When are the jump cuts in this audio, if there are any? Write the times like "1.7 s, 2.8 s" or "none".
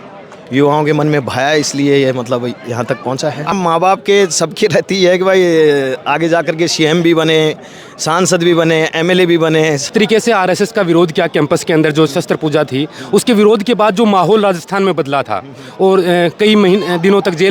3.5 s, 9.9 s